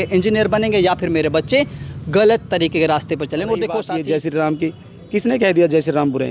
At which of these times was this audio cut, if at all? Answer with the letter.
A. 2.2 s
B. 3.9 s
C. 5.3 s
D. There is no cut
B